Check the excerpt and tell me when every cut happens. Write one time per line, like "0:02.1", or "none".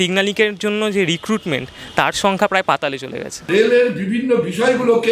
0:03.5